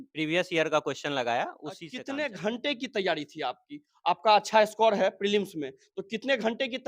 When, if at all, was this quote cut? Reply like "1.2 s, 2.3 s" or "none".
1.9 s